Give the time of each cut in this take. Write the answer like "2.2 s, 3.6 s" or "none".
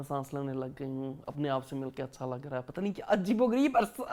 none